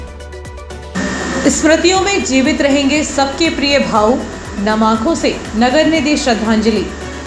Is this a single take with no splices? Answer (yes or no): yes